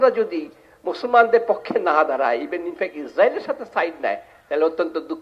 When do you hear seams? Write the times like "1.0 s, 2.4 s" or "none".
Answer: none